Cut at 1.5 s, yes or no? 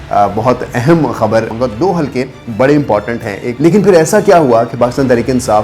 yes